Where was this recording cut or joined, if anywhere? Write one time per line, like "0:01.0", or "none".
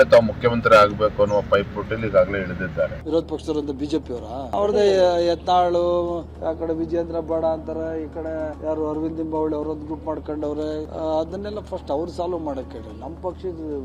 none